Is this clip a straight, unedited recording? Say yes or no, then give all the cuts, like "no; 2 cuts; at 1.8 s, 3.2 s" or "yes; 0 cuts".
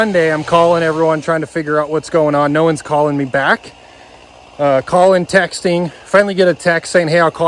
yes; 0 cuts